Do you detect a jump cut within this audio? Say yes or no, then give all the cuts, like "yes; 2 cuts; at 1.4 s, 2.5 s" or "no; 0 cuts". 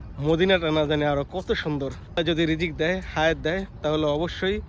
yes; 1 cut; at 2.2 s